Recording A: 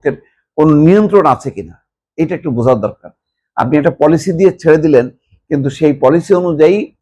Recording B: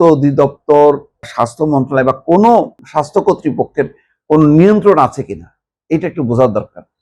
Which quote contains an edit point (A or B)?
B